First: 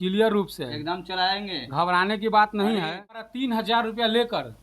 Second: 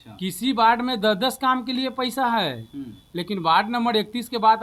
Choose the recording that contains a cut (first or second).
first